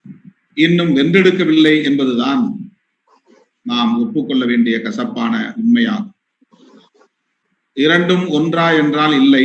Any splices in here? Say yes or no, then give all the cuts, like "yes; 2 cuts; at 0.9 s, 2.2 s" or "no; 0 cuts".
yes; 1 cut; at 7.3 s